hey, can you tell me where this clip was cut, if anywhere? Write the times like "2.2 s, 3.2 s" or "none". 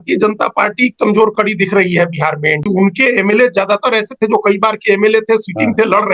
2.6 s